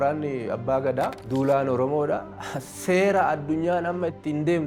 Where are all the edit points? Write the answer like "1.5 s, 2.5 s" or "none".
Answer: 1.2 s